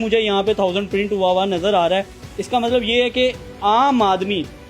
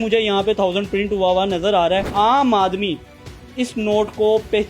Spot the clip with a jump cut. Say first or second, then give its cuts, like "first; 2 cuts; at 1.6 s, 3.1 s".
second; 1 cut; at 2.1 s